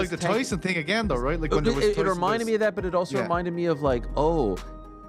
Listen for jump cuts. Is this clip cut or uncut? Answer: uncut